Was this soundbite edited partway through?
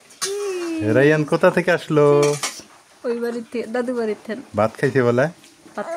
no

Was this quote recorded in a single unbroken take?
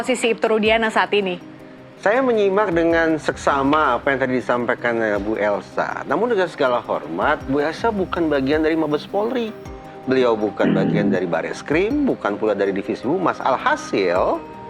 yes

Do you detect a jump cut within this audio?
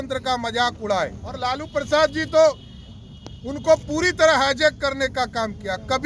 yes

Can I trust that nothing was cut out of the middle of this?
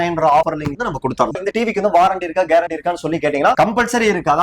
no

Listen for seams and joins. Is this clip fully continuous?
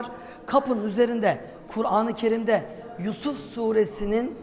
yes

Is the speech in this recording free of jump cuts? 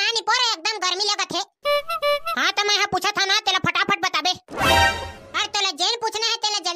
yes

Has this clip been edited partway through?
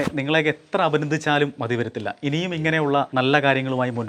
yes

